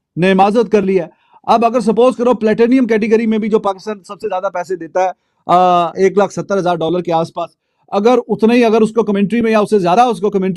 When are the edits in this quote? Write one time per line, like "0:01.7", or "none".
none